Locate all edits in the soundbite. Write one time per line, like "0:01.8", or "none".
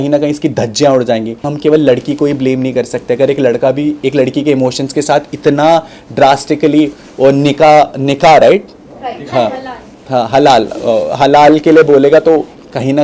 0:01.5

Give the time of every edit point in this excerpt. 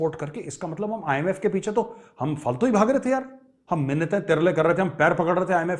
none

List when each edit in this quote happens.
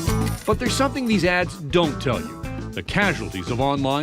0:02.3

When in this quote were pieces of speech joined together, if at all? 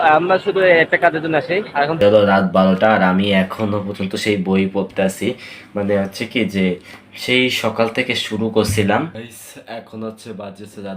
0:02.0
0:09.2

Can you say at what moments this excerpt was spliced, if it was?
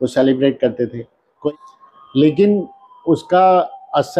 0:01.4

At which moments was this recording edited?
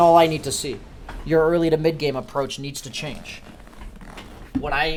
none

